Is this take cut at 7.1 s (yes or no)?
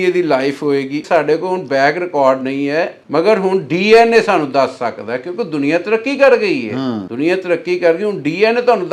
yes